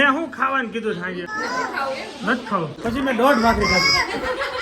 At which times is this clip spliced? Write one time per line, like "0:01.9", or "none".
0:01.3
0:02.7